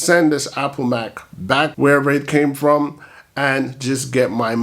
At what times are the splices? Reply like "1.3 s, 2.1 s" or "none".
1.7 s